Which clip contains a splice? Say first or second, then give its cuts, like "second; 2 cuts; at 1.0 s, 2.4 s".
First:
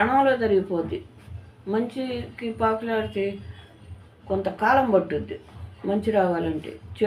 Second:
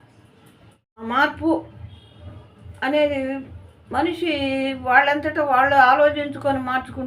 second; 1 cut; at 1.0 s